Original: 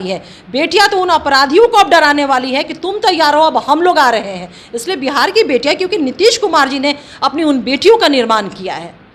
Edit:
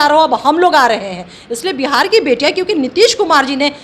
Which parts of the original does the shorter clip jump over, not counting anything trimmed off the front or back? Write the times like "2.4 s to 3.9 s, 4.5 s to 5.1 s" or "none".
none